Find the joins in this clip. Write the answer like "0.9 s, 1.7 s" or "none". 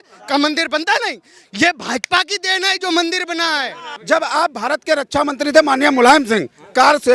3.9 s